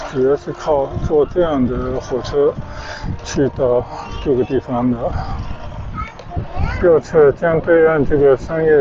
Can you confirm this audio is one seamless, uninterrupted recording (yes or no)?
no